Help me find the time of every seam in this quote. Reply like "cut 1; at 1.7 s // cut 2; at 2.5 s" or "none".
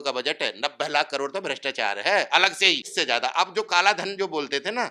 cut 1; at 2.9 s